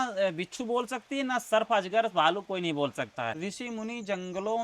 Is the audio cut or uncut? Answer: cut